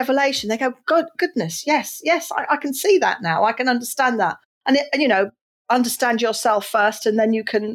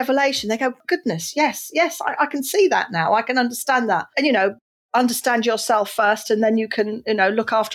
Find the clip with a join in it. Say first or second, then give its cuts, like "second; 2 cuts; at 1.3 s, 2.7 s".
second; 2 cuts; at 0.8 s, 4.1 s